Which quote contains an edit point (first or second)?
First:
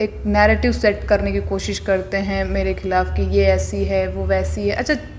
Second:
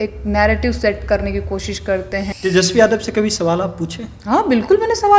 second